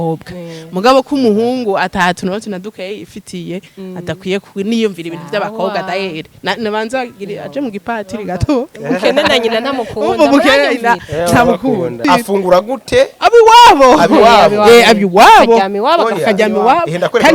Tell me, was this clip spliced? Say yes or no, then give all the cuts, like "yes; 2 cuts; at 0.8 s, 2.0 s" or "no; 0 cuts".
yes; 1 cut; at 12.0 s